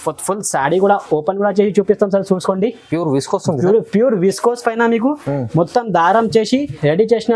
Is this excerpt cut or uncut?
uncut